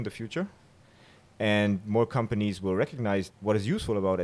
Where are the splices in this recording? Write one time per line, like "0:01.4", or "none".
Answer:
0:03.3